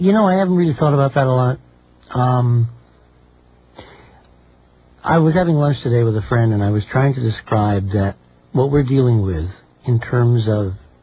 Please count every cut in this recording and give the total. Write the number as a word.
one